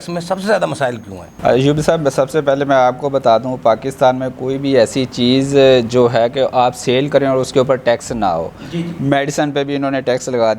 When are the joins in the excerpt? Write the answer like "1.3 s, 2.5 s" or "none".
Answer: none